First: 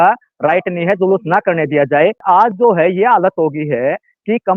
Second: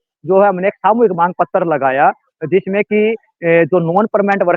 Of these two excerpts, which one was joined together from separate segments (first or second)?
first